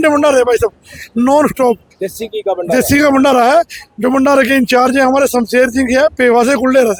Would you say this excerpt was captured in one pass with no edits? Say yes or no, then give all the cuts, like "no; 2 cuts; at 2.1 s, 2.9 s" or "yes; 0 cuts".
yes; 0 cuts